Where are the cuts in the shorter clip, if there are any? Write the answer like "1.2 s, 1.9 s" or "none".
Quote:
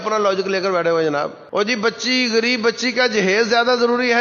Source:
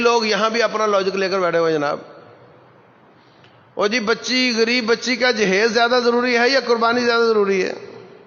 1.4 s